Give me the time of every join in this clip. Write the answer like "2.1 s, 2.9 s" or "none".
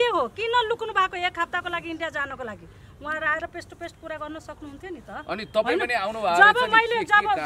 none